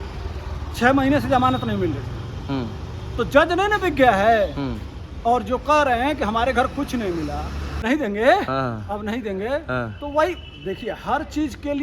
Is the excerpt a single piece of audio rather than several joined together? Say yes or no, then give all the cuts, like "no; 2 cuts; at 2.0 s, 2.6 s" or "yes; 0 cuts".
no; 1 cut; at 7.8 s